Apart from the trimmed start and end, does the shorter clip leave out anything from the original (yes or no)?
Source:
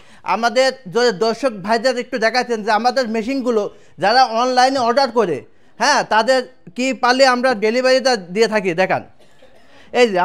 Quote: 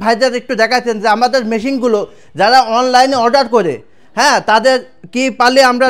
no